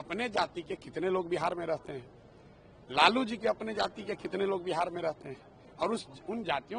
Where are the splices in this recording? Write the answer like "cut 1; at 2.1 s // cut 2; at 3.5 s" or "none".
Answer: none

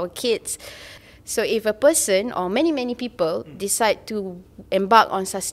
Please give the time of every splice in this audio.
cut 1; at 0.9 s

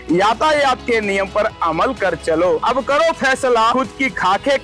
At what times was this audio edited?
cut 1; at 2.6 s // cut 2; at 3.7 s

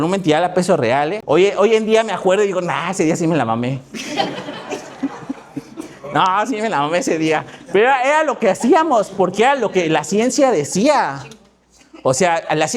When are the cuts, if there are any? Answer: cut 1; at 1.2 s

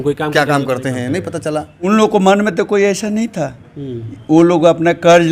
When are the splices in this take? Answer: cut 1; at 1.9 s

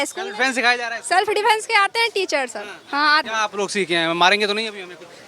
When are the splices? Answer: cut 1; at 3.3 s

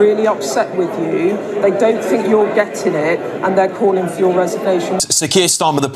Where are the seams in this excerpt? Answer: cut 1; at 5.0 s

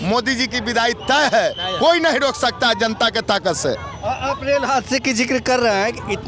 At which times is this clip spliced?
none

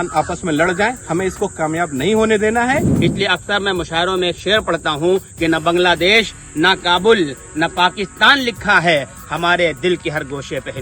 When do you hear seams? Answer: cut 1; at 2.9 s

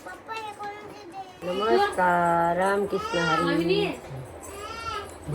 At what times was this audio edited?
cut 1; at 1.3 s

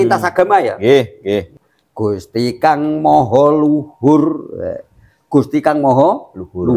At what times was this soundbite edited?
cut 1; at 1.6 s

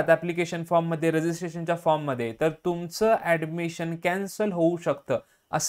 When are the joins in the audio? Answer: none

